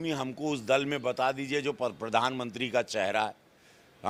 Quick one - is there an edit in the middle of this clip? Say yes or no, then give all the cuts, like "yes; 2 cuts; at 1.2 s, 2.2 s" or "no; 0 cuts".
no; 0 cuts